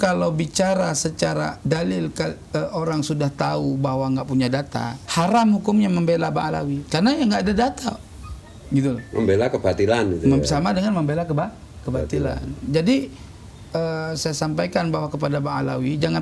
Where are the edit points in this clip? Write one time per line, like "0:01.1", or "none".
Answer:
0:01.6
0:05.0
0:06.8